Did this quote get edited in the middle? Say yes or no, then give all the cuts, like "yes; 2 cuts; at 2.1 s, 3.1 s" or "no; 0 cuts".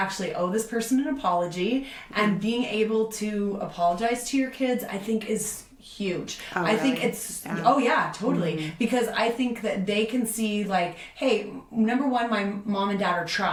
no; 0 cuts